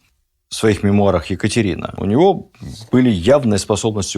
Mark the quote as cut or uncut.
cut